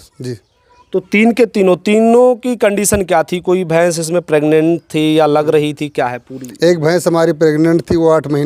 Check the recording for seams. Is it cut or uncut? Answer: uncut